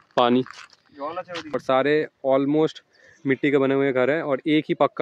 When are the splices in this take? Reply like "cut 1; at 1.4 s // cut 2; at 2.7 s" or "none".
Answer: cut 1; at 1.5 s